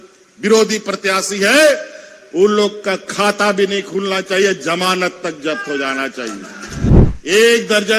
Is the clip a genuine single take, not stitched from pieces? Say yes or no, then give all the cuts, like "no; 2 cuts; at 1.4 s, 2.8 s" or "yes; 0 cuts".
no; 1 cut; at 6.9 s